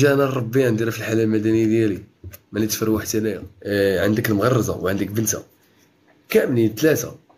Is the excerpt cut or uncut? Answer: cut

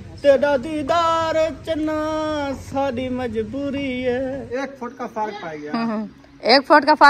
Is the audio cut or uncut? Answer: cut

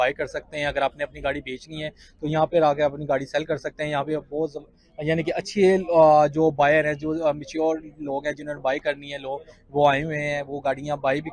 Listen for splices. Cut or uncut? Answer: uncut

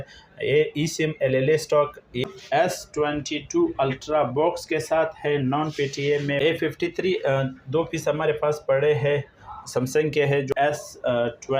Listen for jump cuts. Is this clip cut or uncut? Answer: cut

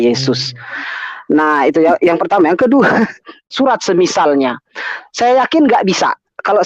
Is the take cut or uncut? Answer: cut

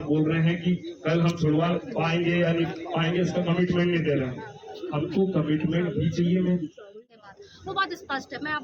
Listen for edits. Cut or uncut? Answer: cut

